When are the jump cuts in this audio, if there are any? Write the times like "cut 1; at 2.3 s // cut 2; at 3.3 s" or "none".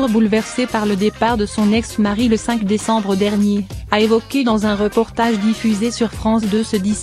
none